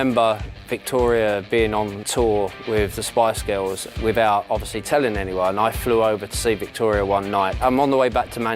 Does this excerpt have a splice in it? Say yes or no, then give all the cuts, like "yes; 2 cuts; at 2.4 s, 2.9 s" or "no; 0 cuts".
yes; 3 cuts; at 2.0 s, 3.8 s, 7.6 s